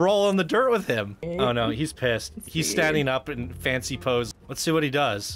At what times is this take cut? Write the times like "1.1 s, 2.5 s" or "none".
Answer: 1.2 s, 4.3 s

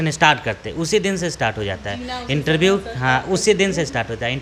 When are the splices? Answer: none

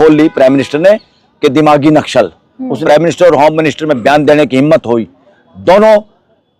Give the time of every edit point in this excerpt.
2.8 s

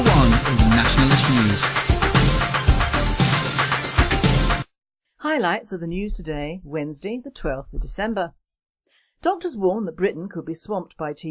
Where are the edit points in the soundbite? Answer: none

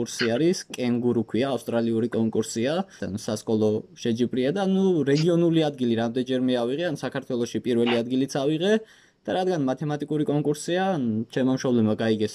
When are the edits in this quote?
2.9 s

